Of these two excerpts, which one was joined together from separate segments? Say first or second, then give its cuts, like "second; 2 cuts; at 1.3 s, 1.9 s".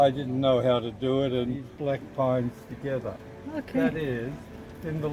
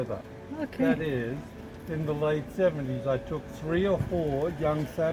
first; 1 cut; at 1.7 s